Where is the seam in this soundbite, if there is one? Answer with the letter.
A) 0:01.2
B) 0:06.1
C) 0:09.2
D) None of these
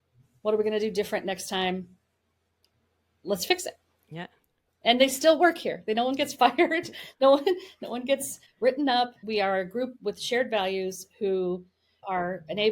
C